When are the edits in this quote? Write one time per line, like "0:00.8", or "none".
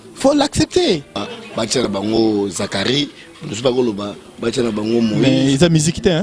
0:01.2